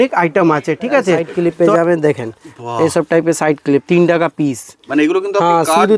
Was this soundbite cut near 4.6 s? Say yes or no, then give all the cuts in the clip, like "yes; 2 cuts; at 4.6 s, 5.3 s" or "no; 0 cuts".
no; 1 cut; at 1.3 s